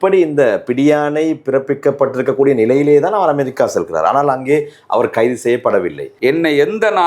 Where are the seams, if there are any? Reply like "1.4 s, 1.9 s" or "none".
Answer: 6.0 s